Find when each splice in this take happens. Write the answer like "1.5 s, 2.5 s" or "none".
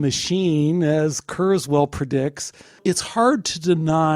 2.8 s